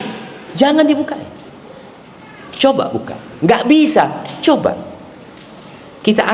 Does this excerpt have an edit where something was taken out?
no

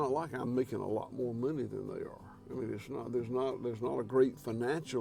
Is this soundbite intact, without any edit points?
yes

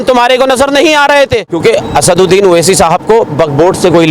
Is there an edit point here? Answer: yes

